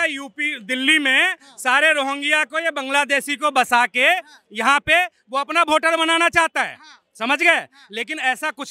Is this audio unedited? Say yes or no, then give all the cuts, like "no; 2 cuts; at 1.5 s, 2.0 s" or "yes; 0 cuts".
yes; 0 cuts